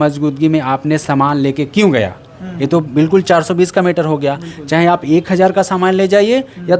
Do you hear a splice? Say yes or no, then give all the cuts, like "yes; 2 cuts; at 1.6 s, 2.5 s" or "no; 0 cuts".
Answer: no; 0 cuts